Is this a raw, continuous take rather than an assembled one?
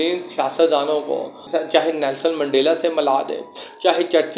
yes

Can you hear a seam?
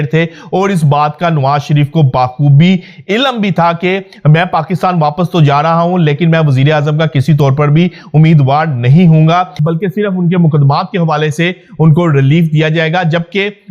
yes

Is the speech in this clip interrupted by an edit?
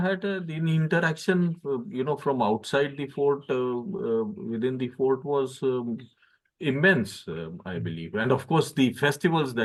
no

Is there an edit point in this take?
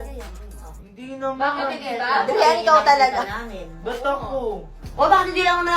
yes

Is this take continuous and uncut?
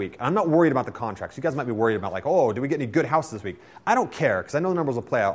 yes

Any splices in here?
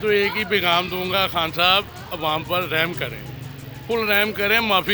no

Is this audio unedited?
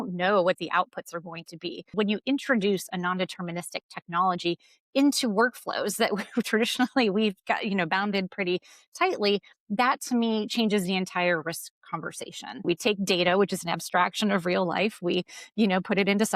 no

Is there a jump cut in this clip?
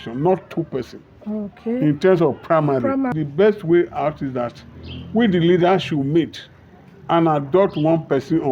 yes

